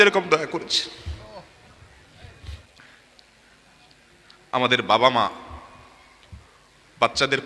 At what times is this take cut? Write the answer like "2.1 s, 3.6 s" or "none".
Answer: none

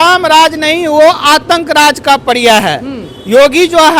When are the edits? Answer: none

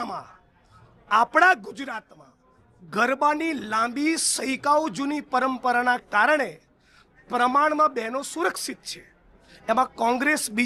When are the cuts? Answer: none

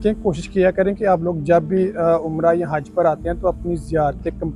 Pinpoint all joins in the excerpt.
none

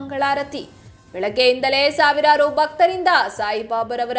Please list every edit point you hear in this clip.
none

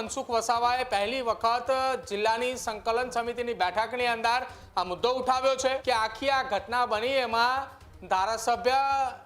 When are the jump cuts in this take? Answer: 5.8 s

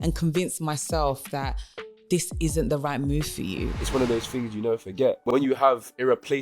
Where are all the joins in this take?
3.8 s, 5.2 s

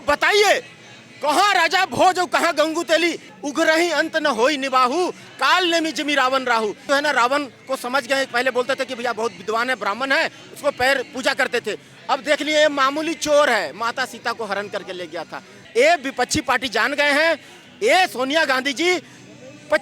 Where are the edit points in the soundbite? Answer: 3.3 s, 6.8 s, 15.6 s

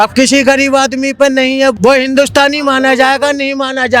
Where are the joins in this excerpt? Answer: 1.8 s

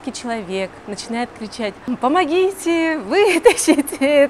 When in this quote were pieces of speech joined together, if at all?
1.9 s

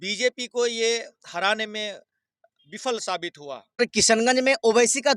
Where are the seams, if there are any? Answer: 3.8 s

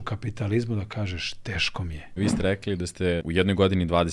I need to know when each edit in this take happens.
2.1 s, 3.2 s

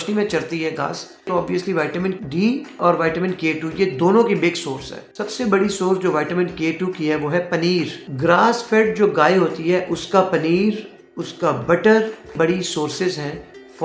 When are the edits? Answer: 12.3 s

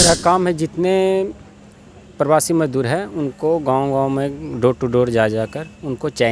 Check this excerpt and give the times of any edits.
none

